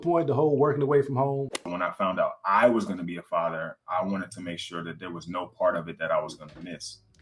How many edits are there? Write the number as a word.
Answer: one